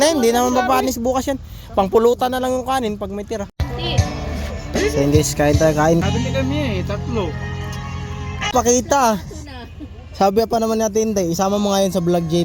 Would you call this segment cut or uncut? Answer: cut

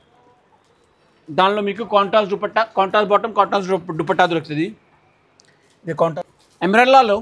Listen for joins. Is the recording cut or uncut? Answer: cut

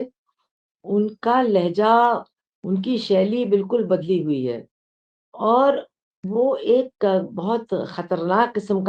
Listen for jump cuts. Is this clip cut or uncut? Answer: uncut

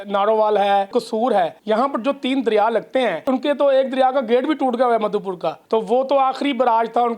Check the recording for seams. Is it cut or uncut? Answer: cut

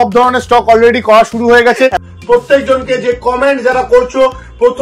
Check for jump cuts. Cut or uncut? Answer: cut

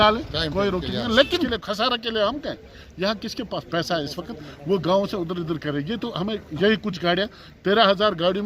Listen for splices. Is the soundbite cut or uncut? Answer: cut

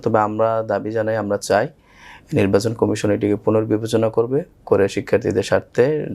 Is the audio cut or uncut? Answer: uncut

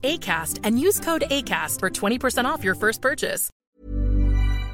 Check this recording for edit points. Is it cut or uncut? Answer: cut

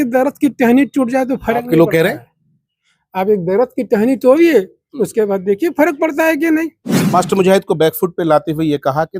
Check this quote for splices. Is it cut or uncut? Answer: cut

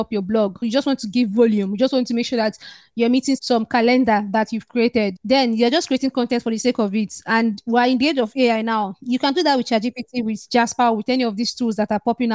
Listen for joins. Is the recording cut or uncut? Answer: uncut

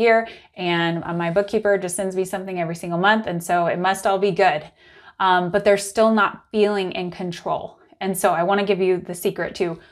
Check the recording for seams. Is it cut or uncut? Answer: uncut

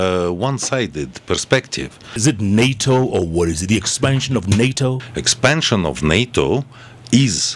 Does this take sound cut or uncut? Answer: cut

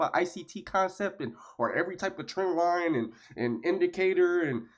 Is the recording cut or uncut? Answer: uncut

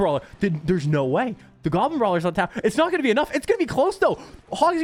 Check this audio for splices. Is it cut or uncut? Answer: uncut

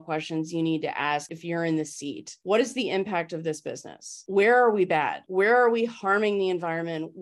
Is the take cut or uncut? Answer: cut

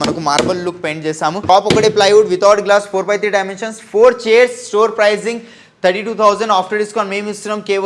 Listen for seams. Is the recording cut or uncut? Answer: cut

